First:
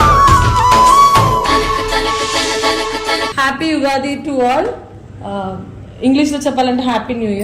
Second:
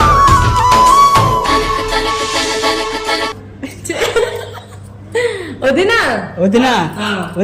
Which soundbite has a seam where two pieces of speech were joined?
first; 1 cut; at 3.3 s

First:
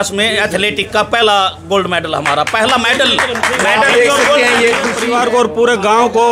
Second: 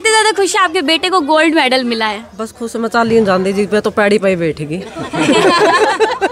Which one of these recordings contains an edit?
first; 1 cut; at 5.0 s

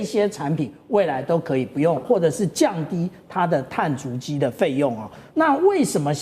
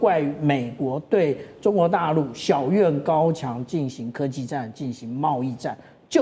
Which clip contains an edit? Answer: first; 1 cut; at 2.0 s

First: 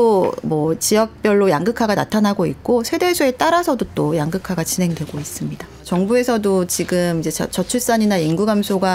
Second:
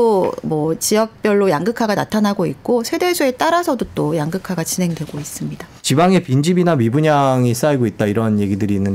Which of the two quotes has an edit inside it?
first; 1 cut; at 5.8 s

